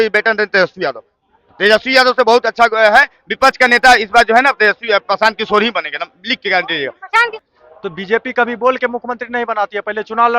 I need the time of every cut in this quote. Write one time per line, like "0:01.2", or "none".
0:07.5